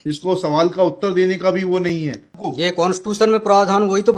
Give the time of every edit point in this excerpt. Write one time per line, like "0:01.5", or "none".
0:02.4